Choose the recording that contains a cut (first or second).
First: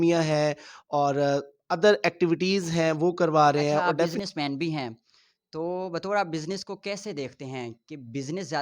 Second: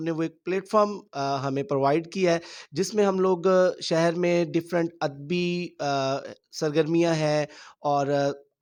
first